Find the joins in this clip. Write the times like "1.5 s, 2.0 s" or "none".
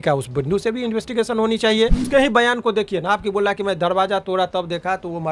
2.1 s